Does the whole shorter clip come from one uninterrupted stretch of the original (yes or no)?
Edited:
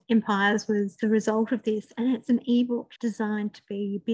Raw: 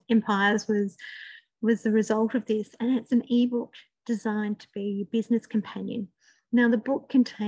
no